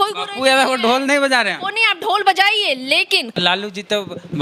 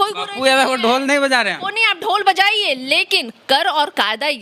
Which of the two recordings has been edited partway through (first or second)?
first